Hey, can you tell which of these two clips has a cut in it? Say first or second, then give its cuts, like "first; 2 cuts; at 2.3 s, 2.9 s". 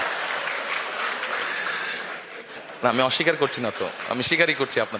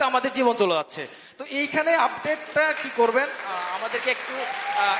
first; 1 cut; at 2.6 s